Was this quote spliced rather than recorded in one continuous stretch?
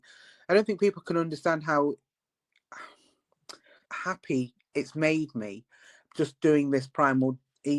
yes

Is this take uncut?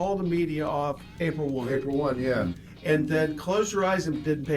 no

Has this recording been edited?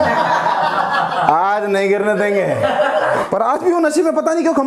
yes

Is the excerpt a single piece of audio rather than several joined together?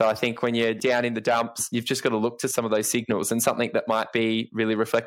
no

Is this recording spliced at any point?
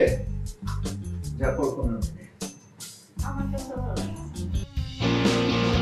no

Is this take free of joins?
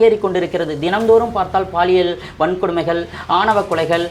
yes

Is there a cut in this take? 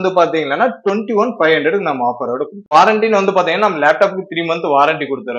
yes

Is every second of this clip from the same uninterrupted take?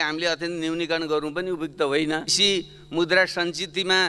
no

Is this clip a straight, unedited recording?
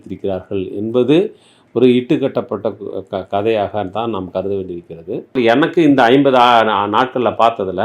no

